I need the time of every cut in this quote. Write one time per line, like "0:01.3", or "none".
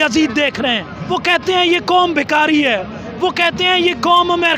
0:00.9